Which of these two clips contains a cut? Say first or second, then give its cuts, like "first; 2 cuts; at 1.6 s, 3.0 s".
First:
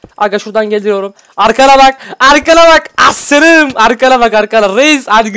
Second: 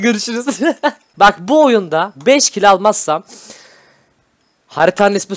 second; 1 cut; at 1.1 s